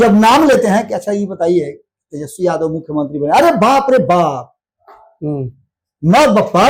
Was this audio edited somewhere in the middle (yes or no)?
no